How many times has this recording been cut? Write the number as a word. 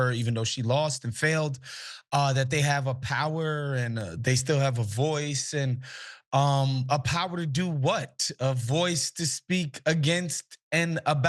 one